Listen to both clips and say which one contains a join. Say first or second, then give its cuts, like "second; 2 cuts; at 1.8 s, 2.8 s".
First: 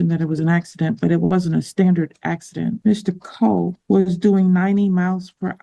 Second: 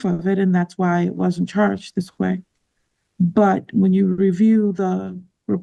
first; 2 cuts; at 2.8 s, 3.8 s